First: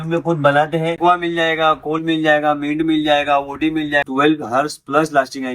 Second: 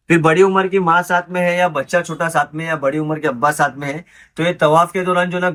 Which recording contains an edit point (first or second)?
first